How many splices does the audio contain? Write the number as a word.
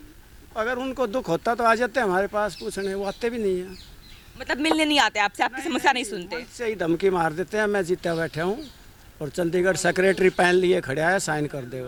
zero